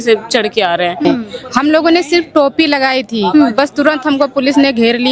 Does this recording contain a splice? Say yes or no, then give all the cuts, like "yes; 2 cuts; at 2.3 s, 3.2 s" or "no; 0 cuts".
yes; 1 cut; at 1.0 s